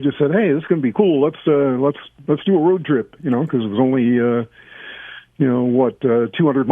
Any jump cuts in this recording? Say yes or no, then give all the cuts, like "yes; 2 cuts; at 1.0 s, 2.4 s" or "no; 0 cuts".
no; 0 cuts